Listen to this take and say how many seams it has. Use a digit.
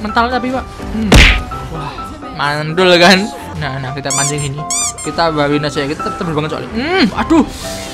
1